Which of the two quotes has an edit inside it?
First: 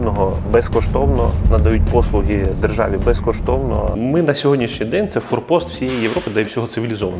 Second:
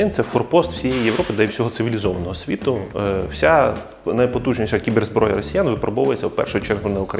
first; 1 cut; at 3.9 s

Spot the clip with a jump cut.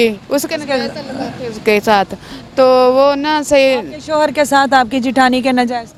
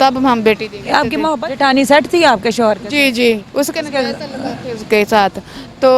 second; 1 cut; at 1.3 s

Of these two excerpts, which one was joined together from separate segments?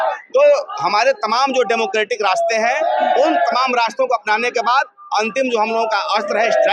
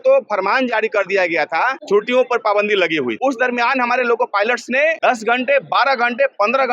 second; 3 cuts; at 1.8 s, 3.2 s, 5.0 s

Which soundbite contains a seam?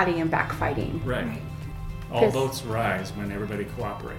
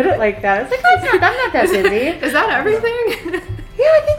first; 1 cut; at 1.8 s

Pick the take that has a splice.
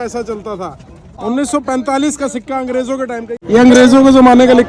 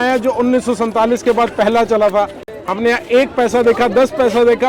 first; 2 cuts; at 1.0 s, 3.4 s

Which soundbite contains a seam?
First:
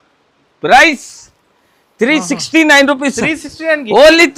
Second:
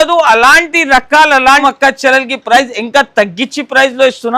second; 1 cut; at 1.6 s

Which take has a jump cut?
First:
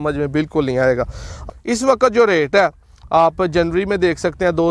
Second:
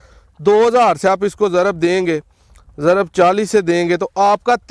first; 1 cut; at 1.4 s

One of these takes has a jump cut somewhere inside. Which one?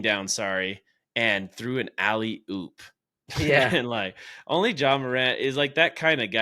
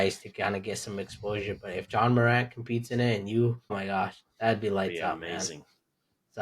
second; 1 cut; at 3.8 s

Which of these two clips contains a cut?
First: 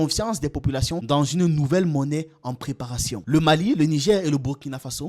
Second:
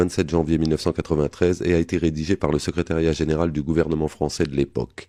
first; 1 cut; at 3.2 s

